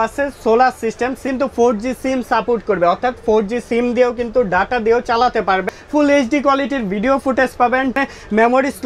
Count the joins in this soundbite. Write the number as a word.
three